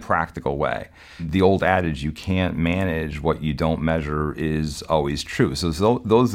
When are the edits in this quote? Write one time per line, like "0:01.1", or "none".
0:01.3